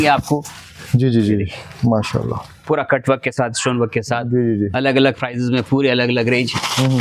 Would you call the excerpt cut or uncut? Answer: uncut